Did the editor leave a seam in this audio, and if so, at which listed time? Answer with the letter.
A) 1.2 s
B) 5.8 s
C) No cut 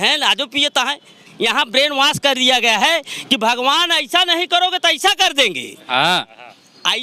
A